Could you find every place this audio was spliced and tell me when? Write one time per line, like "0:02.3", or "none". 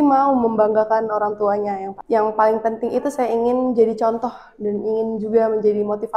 0:01.9